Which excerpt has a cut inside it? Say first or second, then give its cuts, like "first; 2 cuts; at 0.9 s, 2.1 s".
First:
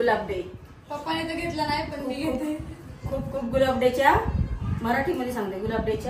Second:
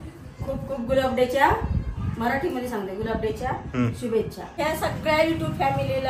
second; 1 cut; at 4.4 s